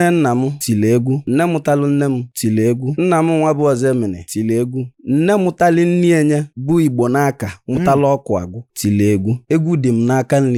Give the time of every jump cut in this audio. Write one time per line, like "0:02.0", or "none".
none